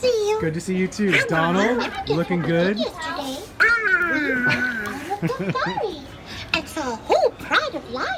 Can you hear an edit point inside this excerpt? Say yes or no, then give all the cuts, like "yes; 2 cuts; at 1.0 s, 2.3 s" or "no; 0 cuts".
no; 0 cuts